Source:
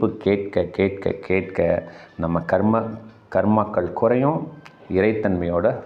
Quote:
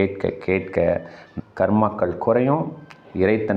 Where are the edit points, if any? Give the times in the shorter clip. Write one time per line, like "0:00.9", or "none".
0:01.3

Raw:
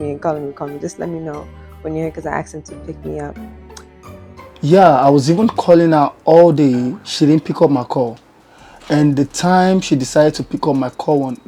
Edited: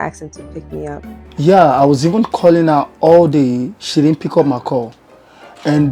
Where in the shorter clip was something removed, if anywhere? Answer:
0:01.2

